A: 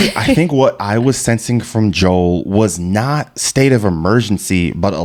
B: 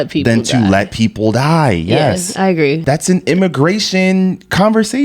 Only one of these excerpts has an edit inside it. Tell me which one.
B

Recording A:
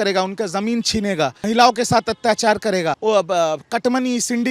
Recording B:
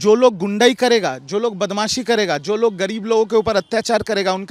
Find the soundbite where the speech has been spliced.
A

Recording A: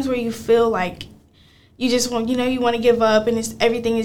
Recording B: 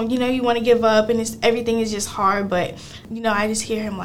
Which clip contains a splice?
B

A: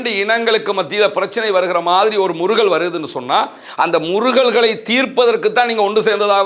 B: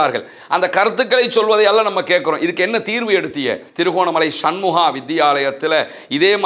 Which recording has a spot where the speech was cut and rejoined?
B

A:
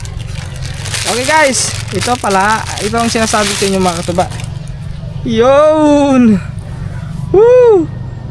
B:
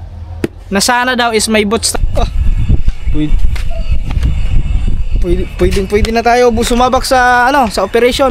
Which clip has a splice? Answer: B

